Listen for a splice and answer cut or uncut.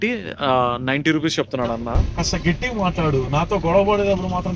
cut